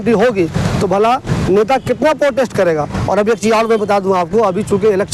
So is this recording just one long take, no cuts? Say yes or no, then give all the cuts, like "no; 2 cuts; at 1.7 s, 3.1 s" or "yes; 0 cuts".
yes; 0 cuts